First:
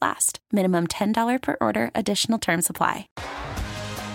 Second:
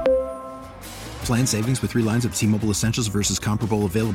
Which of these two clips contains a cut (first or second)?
first